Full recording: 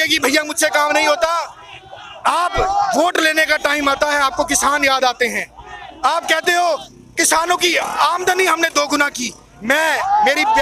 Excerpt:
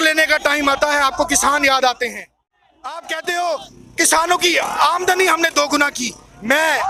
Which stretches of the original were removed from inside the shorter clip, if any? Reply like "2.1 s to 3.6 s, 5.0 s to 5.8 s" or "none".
none